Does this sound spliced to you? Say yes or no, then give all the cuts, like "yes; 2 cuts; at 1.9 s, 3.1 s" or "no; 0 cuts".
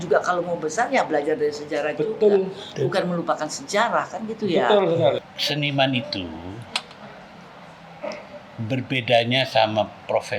yes; 1 cut; at 5.2 s